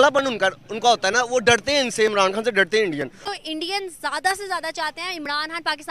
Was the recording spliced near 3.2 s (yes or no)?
yes